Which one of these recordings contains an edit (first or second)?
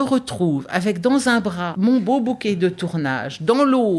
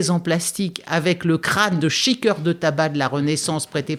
first